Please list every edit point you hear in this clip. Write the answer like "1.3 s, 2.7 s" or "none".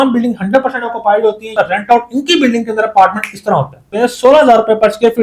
1.5 s, 3.9 s